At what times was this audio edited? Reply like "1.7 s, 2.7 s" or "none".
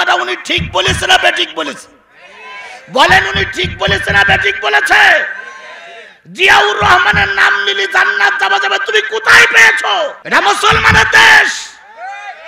10.2 s